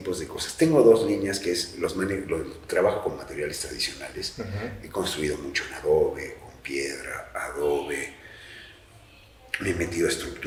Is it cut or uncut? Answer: uncut